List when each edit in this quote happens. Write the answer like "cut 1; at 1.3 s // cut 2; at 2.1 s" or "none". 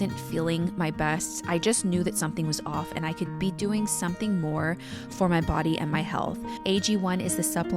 cut 1; at 6.5 s